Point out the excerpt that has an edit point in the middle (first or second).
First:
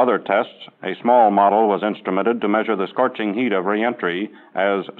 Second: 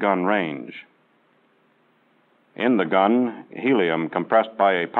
second